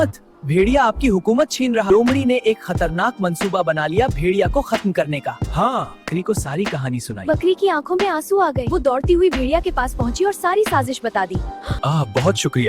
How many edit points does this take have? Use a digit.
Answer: 3